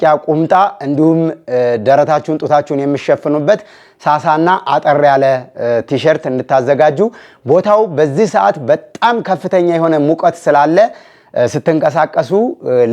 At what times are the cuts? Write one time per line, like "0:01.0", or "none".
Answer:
none